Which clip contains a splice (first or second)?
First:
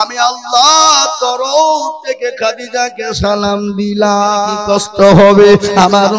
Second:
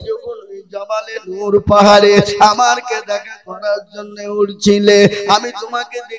first